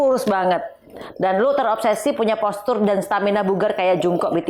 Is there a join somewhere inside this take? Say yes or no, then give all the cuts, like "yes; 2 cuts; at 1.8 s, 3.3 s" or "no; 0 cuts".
no; 0 cuts